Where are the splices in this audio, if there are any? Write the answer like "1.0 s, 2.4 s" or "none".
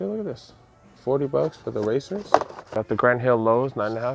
2.7 s